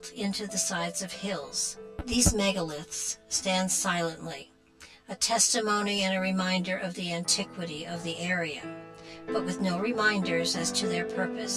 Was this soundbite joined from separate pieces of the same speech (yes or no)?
no